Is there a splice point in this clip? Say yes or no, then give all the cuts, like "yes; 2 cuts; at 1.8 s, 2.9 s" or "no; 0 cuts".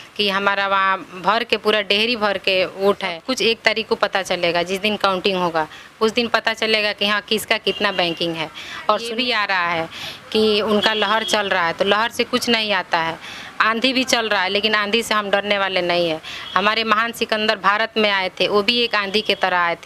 yes; 2 cuts; at 3.2 s, 9.1 s